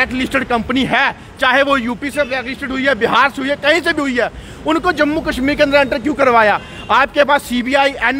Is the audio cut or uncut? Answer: uncut